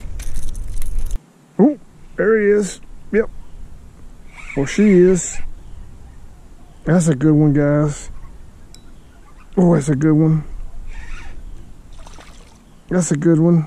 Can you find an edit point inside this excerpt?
yes; 1 cut; at 1.2 s

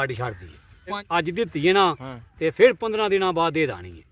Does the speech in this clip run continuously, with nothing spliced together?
no; 1 cut; at 1.0 s

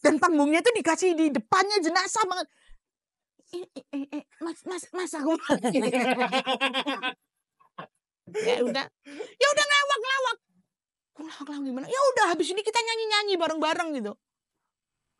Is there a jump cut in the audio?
no; 0 cuts

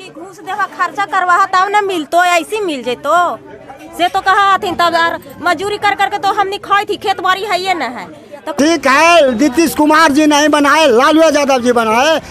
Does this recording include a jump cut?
yes; 1 cut; at 8.5 s

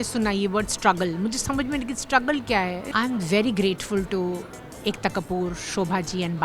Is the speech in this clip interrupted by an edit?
yes; 1 cut; at 2.8 s

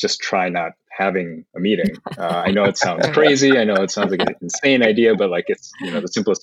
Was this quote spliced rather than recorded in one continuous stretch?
no; 0 cuts

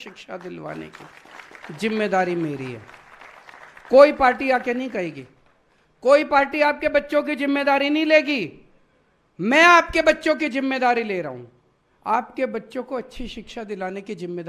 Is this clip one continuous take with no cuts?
yes; 0 cuts

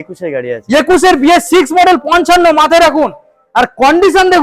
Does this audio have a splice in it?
no; 0 cuts

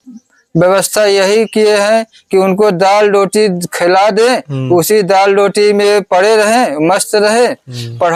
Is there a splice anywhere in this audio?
no; 0 cuts

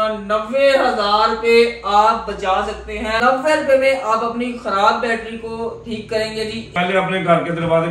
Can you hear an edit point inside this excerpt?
yes; 2 cuts; at 3.2 s, 6.6 s

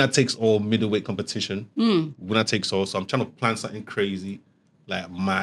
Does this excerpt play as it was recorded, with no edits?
yes; 0 cuts

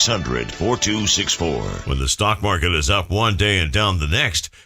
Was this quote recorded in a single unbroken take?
no; 1 cut; at 1.7 s

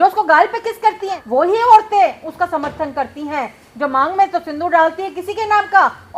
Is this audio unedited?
no; 1 cut; at 1.2 s

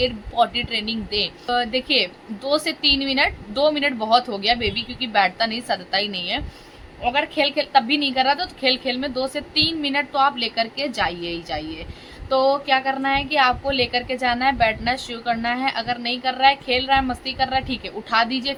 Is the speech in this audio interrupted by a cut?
no; 0 cuts

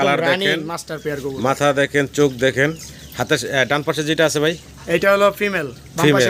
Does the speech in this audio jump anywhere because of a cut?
no; 0 cuts

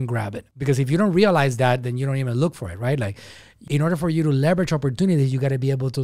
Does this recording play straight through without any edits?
no; 1 cut; at 3.7 s

